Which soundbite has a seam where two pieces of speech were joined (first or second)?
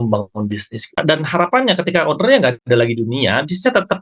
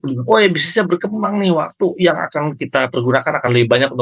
first